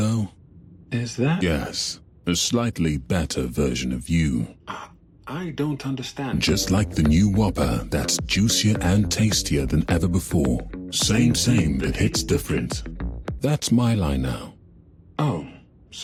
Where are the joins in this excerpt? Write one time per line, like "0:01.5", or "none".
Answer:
none